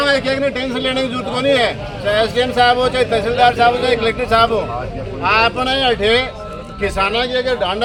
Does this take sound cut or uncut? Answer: uncut